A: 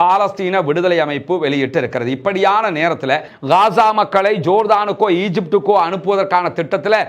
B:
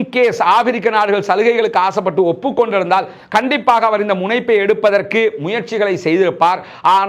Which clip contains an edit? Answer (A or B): A